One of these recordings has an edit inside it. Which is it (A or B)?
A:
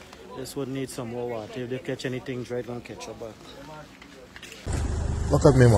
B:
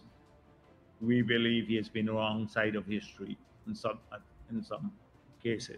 A